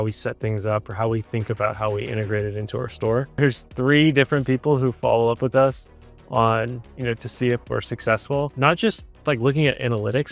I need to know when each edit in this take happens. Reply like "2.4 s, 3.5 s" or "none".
3.4 s, 8.5 s

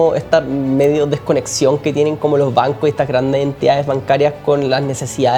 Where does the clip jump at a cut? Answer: none

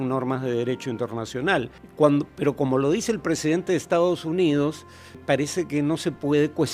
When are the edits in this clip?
1.8 s, 5.2 s

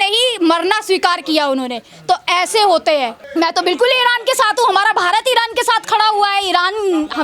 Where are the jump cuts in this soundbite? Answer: 3.2 s

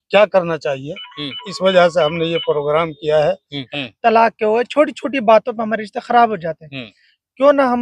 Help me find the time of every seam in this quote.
3.5 s

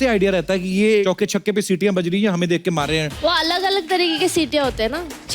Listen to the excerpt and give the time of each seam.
1.0 s, 3.2 s

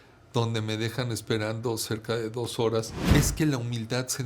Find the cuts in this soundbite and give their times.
3.0 s

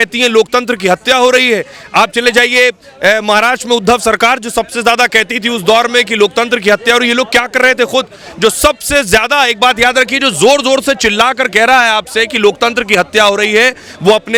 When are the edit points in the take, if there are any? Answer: none

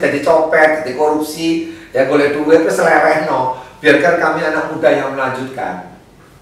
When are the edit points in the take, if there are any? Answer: none

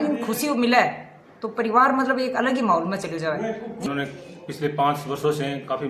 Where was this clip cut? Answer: 3.9 s

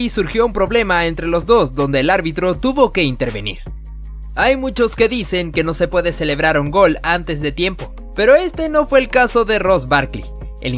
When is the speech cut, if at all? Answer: none

